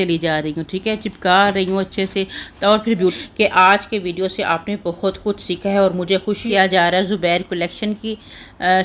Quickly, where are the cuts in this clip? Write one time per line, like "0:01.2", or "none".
0:03.2
0:06.4

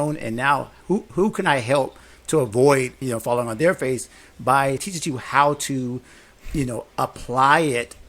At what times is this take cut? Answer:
0:02.9
0:04.8

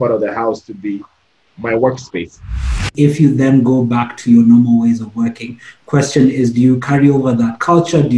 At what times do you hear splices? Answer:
0:02.9

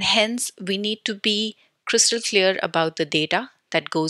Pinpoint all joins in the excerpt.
none

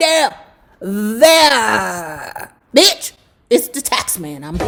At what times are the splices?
none

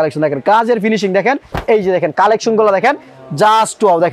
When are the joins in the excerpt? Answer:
0:01.5

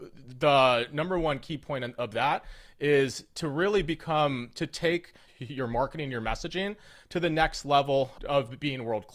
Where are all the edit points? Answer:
none

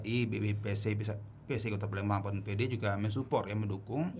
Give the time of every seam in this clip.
none

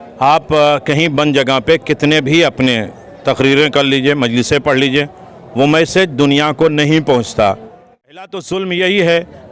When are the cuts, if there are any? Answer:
0:08.1

